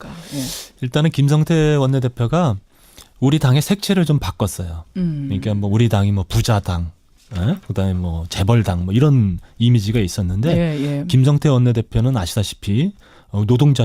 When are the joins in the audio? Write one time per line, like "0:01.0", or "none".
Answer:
0:06.9

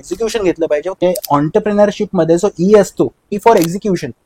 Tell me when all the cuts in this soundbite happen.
0:00.9
0:03.3

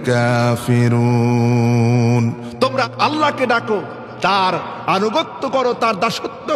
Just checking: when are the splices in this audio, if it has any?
0:02.9

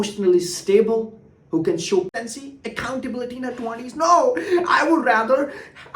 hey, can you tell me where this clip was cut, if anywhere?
0:02.1

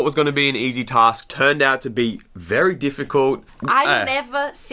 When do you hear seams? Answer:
0:03.5

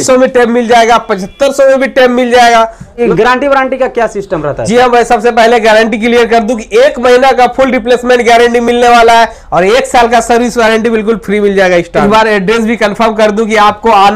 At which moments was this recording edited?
0:03.1
0:12.0

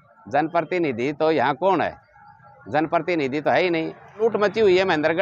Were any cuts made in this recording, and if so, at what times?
0:04.2

